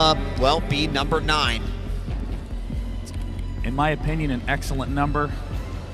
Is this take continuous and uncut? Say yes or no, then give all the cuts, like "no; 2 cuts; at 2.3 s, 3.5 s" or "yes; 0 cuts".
no; 1 cut; at 1.1 s